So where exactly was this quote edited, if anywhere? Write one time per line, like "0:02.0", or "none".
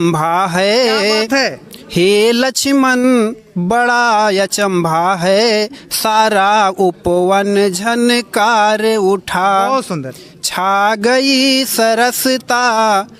none

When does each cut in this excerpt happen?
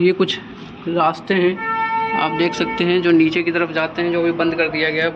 none

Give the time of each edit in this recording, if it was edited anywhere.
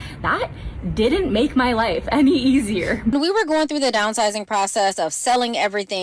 0:03.1

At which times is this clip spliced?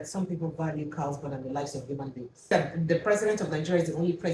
0:02.5

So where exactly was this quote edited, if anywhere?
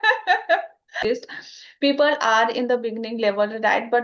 0:01.0

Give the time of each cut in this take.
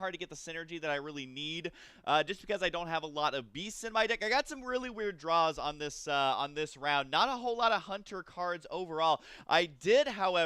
0:04.4

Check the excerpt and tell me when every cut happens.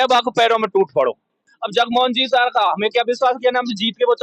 0:01.5

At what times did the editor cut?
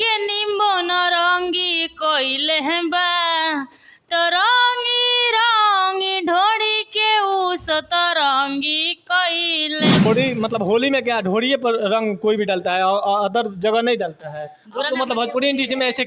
0:10.0

